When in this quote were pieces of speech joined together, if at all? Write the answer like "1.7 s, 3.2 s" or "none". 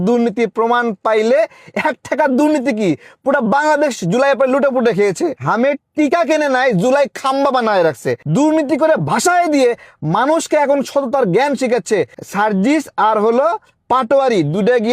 5.4 s, 8.1 s, 12.2 s